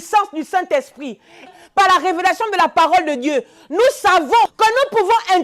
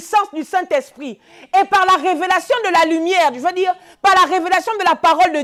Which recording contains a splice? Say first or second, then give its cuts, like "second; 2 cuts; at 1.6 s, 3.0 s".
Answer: first; 2 cuts; at 1.5 s, 4.5 s